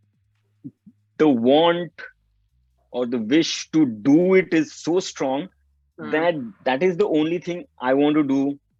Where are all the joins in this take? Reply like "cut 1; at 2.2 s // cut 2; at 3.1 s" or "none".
none